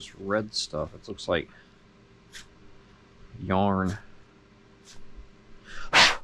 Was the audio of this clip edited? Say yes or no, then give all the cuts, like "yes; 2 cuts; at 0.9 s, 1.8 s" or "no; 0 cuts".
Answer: no; 0 cuts